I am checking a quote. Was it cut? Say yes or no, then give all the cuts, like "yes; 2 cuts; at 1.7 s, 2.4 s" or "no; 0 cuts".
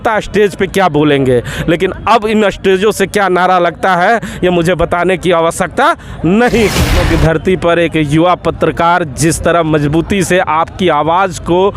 yes; 1 cut; at 7.0 s